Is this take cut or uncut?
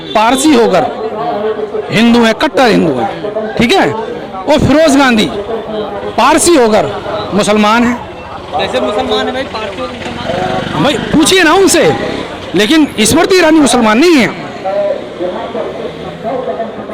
uncut